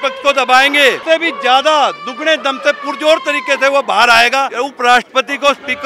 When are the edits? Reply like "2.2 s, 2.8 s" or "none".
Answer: 1.0 s, 4.5 s